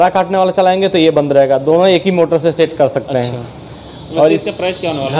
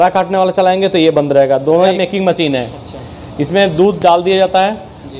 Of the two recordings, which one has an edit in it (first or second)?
second